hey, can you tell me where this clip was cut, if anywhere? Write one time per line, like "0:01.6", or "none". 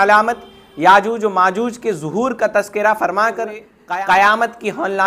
0:03.7

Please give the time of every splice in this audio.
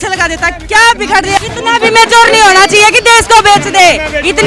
0:01.4

